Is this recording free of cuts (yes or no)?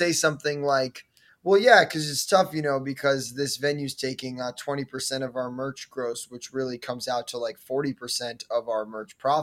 yes